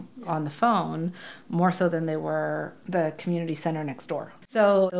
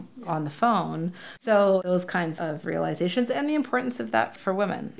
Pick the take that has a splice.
second; 1 cut; at 1.3 s

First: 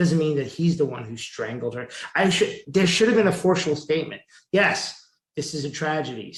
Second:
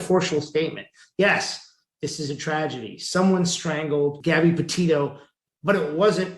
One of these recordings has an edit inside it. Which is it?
second; 1 cut; at 4.2 s

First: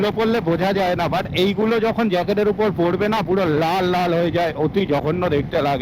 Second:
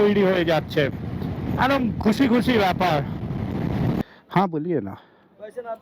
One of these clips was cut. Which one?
second; 1 cut; at 4.0 s

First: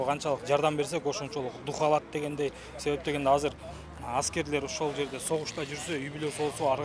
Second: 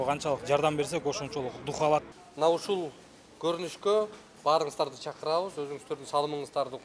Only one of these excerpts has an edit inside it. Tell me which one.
second; 1 cut; at 2.1 s

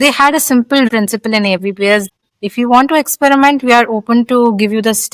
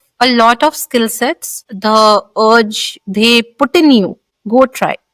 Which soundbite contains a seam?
first; 2 cuts; at 0.9 s, 2.1 s

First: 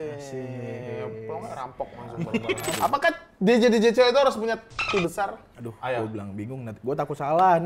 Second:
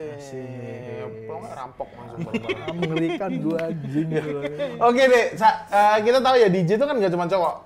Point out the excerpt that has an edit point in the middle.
first; 2 cuts; at 2.7 s, 5.4 s

